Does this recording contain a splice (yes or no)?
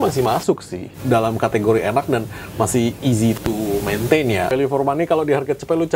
yes